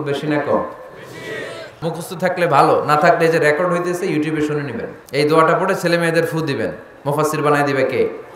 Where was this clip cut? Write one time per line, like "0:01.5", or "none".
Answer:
0:01.8
0:05.0